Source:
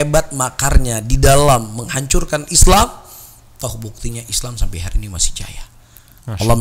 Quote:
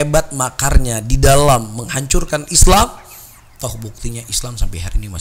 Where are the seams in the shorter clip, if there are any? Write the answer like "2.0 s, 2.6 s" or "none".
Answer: none

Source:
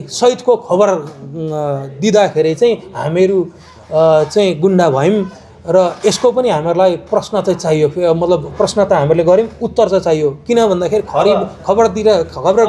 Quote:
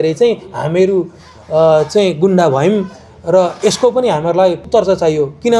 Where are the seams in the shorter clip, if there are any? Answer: 4.6 s

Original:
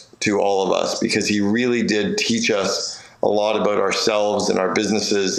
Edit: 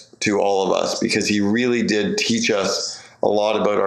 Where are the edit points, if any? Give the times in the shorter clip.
none

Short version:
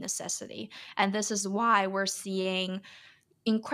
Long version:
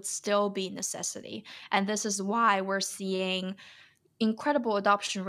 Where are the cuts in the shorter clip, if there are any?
none

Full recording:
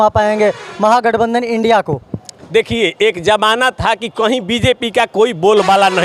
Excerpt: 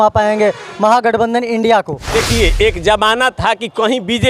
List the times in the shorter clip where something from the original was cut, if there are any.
2.0 s

